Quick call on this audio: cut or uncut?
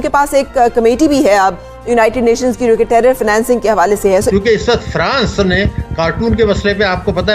cut